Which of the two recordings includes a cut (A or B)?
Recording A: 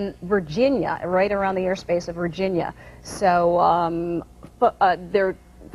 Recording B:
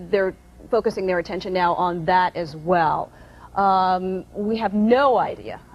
A